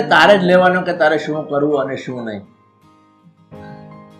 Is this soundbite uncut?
yes; 0 cuts

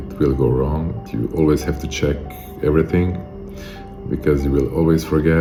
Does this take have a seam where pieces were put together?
no; 0 cuts

